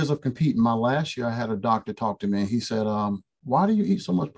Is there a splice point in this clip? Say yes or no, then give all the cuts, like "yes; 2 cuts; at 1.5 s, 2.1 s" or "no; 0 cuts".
no; 0 cuts